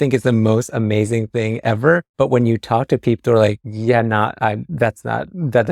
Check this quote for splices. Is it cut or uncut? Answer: cut